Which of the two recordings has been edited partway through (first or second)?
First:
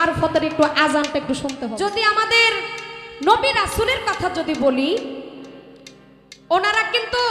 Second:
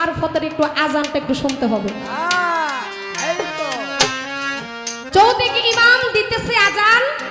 first